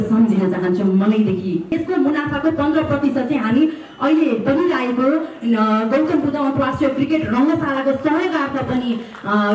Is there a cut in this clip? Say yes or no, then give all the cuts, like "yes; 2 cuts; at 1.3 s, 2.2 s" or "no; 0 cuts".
yes; 1 cut; at 1.7 s